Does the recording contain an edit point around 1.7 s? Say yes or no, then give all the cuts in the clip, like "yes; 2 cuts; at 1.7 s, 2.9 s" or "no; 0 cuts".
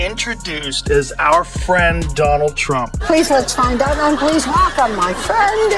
no; 1 cut; at 3.0 s